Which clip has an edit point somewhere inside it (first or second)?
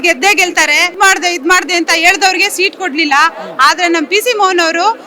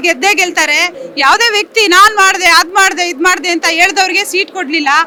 first